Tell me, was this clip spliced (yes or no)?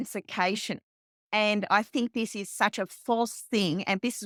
no